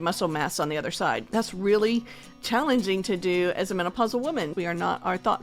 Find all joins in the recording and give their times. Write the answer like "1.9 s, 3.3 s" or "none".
1.2 s, 4.5 s